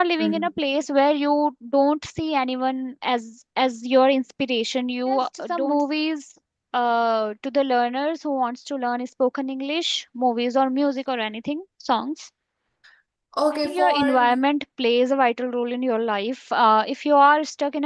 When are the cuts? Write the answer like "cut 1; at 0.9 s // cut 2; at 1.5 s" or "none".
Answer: cut 1; at 5.4 s // cut 2; at 13.9 s

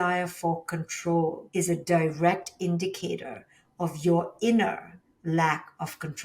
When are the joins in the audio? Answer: cut 1; at 1.4 s

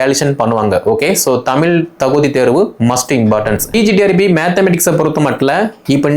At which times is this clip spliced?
cut 1; at 3.7 s

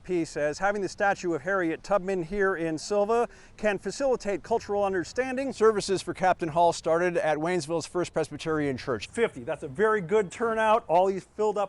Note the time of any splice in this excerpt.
cut 1; at 5.5 s // cut 2; at 9.0 s

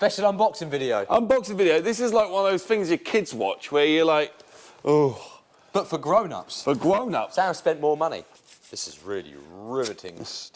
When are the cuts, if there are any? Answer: cut 1; at 8.3 s

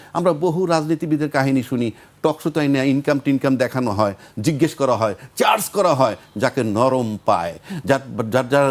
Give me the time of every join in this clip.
none

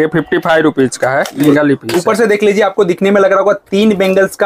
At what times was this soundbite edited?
cut 1; at 1.5 s

